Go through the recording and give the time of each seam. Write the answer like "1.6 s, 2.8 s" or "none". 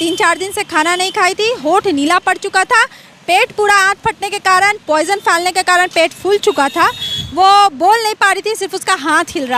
none